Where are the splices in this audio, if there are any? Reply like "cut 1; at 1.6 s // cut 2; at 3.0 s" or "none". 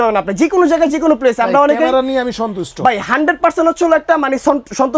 none